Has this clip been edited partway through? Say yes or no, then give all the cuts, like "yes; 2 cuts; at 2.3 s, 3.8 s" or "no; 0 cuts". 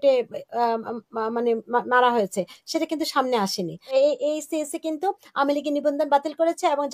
yes; 1 cut; at 3.8 s